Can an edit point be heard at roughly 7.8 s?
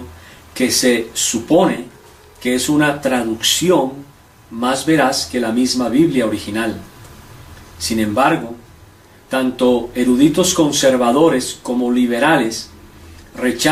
no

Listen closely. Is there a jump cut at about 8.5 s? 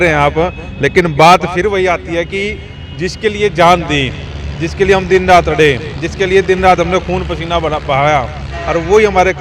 no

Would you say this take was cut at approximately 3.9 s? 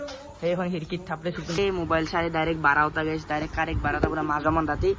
no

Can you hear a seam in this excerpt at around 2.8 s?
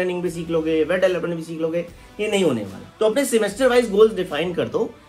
yes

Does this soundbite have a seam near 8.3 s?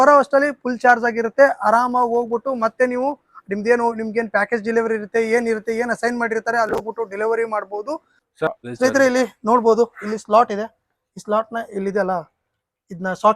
yes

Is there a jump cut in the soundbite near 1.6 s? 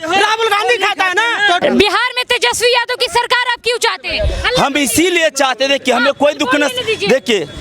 yes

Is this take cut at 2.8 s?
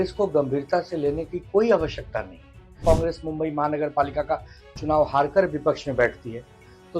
yes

